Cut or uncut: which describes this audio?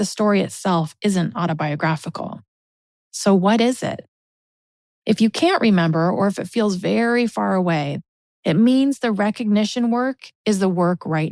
cut